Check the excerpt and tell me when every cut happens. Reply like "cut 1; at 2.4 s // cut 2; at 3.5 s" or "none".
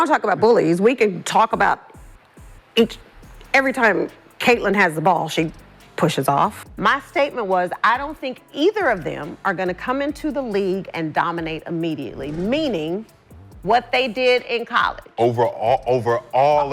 cut 1; at 6.6 s